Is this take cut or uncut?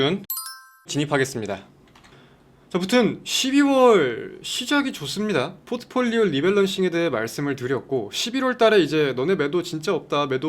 cut